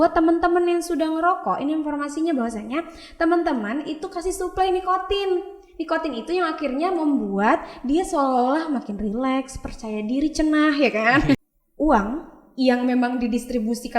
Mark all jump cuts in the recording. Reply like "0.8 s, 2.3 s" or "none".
11.4 s